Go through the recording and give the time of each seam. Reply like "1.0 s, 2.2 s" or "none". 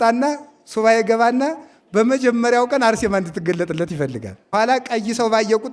4.4 s